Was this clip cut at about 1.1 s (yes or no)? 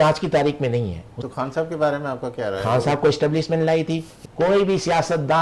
yes